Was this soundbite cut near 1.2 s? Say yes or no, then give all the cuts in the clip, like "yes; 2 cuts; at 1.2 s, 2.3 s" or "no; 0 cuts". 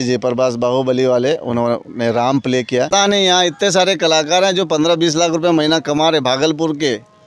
no; 1 cut; at 2.9 s